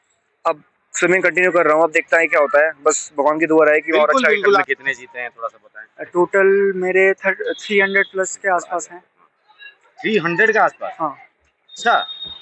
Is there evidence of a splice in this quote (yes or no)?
yes